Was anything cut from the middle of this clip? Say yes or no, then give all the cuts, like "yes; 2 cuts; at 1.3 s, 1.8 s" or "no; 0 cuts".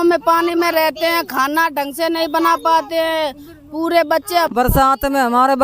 yes; 1 cut; at 4.5 s